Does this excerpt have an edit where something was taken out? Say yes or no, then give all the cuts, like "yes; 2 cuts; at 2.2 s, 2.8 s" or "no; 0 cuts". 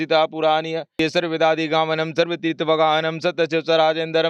yes; 1 cut; at 1.0 s